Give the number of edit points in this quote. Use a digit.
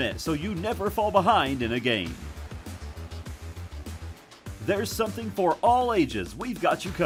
0